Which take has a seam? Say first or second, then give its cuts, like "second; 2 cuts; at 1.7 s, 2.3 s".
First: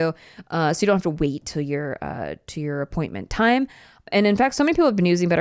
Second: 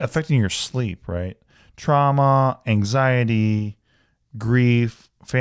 first; 1 cut; at 3.9 s